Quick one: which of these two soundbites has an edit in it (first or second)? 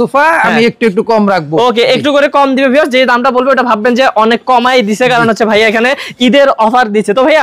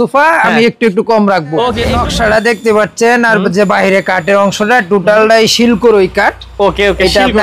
second